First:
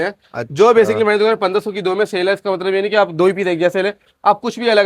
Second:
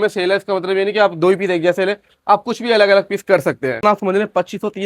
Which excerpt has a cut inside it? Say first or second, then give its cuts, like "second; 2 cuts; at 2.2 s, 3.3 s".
second; 1 cut; at 3.8 s